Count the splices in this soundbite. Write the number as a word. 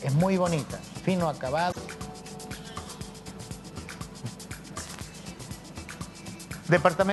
one